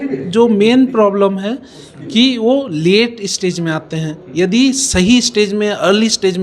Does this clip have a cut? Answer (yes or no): no